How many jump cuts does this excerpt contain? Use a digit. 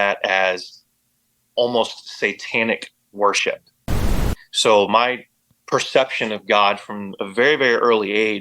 1